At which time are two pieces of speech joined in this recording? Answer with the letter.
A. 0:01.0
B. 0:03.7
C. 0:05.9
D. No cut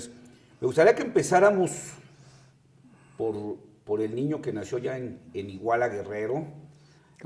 A